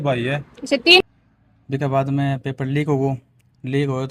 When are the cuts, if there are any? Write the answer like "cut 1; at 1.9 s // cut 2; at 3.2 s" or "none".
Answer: cut 1; at 1.0 s